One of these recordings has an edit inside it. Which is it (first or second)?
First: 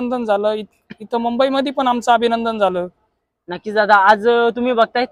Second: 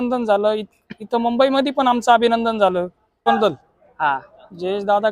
second